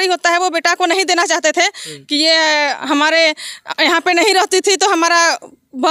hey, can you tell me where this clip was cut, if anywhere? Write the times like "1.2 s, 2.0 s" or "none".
none

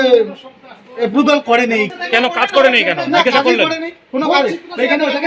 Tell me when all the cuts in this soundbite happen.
1.9 s

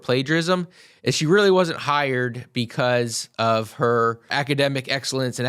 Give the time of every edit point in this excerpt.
none

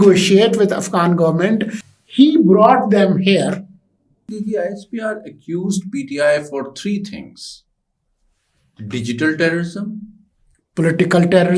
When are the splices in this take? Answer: 1.8 s, 4.4 s

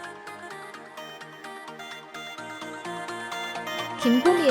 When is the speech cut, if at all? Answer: none

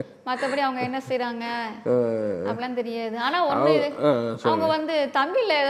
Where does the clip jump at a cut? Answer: none

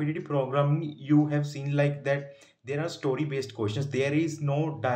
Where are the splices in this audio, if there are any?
none

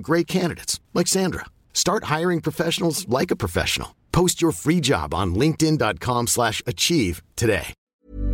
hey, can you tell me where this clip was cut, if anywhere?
none

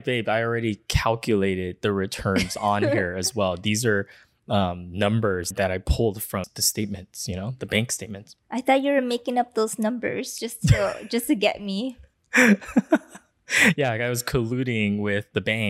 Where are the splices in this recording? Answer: 5.5 s

